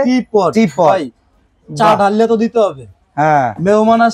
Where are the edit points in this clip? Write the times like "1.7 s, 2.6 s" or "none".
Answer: none